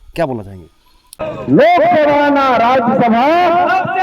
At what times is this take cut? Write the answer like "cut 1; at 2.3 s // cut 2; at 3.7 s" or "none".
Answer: cut 1; at 1.2 s

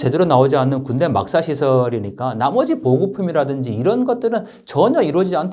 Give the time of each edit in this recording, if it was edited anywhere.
none

